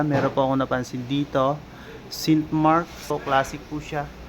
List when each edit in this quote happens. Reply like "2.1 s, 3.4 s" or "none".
3.0 s